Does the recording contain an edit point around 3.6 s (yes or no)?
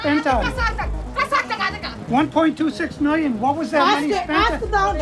yes